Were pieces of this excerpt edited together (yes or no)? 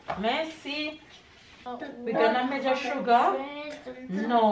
yes